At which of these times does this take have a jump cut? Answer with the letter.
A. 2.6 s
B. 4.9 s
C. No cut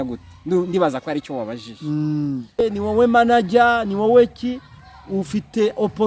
A